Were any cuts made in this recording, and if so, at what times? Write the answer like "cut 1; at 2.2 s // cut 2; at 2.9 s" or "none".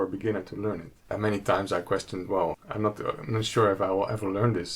cut 1; at 1.1 s // cut 2; at 2.7 s